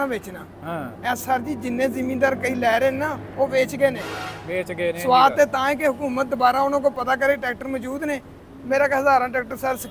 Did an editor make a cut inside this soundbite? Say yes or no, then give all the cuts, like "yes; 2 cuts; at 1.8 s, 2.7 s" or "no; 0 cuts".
no; 0 cuts